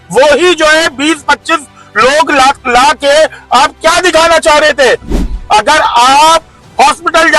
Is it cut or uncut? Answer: uncut